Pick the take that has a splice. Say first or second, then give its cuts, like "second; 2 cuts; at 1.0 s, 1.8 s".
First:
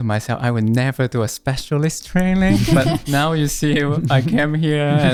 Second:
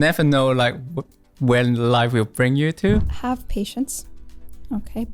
second; 1 cut; at 3.1 s